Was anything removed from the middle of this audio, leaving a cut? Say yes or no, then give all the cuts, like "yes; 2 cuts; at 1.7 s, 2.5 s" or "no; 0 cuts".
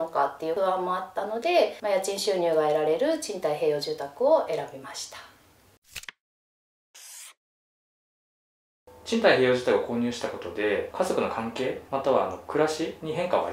no; 0 cuts